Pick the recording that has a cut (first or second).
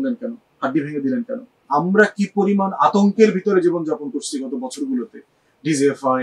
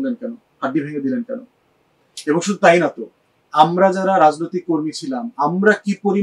first